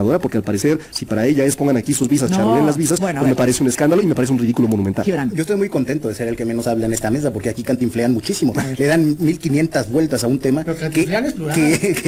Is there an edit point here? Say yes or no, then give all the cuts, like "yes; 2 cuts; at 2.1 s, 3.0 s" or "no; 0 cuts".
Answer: no; 0 cuts